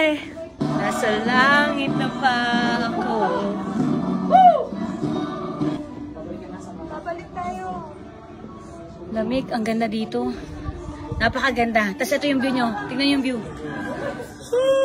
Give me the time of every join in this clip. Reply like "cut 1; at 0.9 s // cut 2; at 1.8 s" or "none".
none